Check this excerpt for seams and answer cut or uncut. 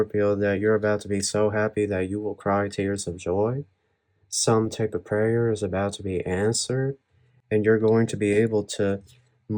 uncut